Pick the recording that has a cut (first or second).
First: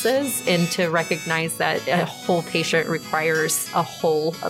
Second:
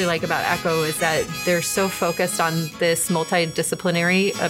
first